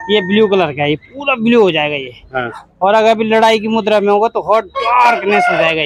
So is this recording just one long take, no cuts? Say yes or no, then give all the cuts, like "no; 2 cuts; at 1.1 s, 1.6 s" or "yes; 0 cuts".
yes; 0 cuts